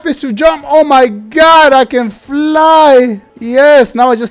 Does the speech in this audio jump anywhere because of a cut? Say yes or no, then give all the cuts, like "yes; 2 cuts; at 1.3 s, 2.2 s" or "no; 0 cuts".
no; 0 cuts